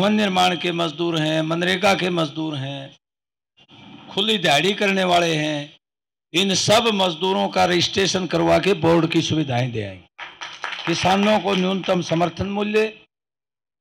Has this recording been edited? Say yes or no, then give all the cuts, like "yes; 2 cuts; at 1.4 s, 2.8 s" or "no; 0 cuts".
no; 0 cuts